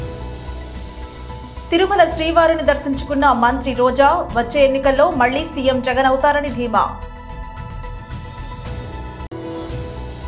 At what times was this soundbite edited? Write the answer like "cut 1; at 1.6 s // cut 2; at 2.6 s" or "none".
cut 1; at 1.0 s